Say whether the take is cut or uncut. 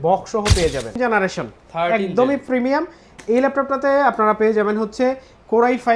cut